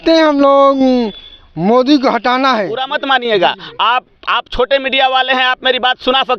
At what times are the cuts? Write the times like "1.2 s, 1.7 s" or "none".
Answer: 2.9 s